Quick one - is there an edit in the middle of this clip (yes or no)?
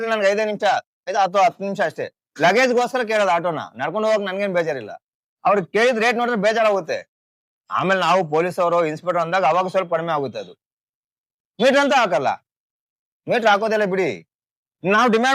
no